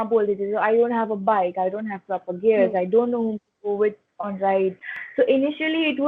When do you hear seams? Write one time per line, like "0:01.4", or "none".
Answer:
0:04.9